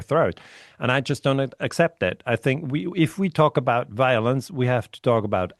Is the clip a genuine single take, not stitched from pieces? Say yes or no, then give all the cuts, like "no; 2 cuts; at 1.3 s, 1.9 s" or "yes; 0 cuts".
yes; 0 cuts